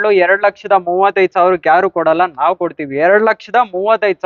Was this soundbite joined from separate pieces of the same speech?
no; 0 cuts

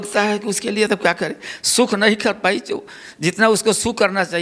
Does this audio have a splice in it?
no; 0 cuts

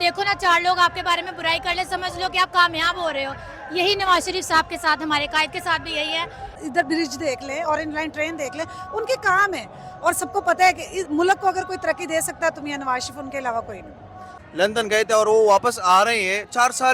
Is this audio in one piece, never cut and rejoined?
no; 2 cuts; at 6.6 s, 14.3 s

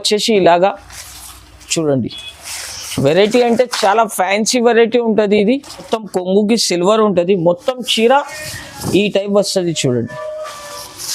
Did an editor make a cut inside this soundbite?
yes; 1 cut; at 6.0 s

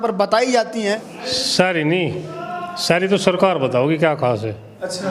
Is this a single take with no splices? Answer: no; 1 cut; at 1.1 s

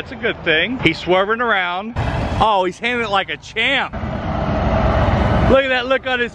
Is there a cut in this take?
no; 0 cuts

